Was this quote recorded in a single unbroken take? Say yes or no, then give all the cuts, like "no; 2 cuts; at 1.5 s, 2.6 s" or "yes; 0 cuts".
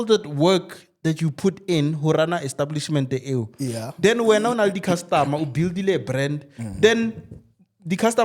yes; 0 cuts